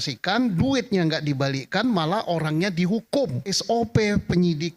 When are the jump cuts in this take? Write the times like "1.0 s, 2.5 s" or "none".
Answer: 3.5 s